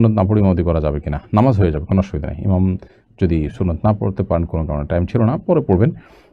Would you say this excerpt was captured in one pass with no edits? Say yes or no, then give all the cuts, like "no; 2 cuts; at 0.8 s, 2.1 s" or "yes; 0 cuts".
yes; 0 cuts